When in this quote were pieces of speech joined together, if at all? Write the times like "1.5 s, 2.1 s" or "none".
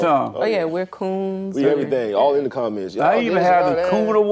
none